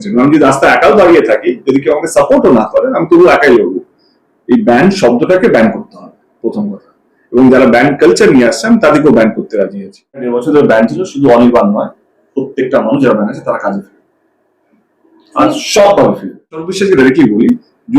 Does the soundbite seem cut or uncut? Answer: cut